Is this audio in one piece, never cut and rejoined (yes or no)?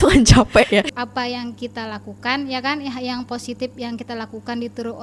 no